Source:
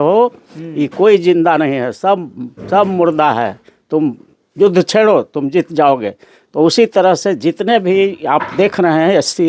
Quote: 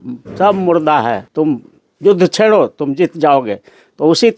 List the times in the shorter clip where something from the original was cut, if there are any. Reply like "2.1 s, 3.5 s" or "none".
1.2 s